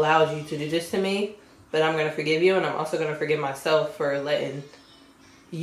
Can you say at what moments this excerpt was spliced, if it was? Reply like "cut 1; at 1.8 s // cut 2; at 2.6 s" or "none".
none